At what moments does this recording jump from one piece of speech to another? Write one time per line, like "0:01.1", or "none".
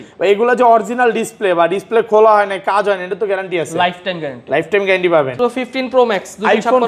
0:05.4